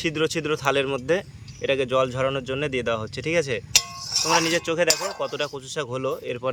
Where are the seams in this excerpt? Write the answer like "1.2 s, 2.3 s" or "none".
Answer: none